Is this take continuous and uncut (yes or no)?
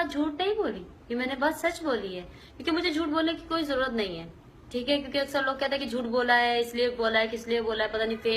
no